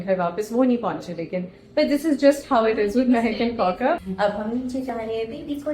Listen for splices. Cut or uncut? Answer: cut